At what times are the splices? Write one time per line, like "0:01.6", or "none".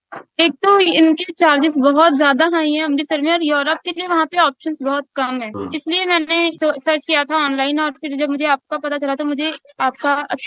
0:05.5
0:06.5